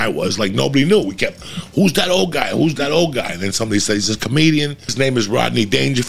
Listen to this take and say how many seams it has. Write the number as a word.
one